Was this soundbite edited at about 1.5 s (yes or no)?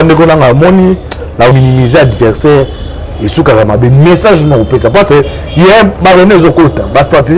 yes